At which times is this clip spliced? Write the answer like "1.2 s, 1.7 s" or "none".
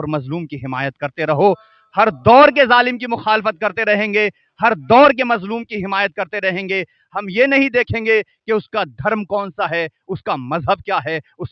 none